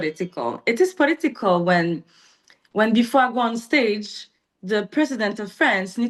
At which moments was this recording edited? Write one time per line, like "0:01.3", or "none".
none